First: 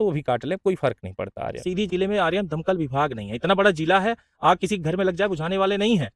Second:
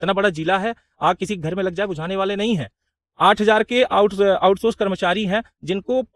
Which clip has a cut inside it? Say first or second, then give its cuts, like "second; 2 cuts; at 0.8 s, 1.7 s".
first; 1 cut; at 1.6 s